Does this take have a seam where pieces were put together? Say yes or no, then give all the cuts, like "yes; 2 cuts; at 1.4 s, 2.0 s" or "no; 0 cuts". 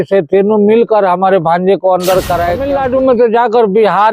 yes; 1 cut; at 2.6 s